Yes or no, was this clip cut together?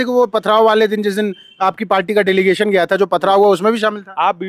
no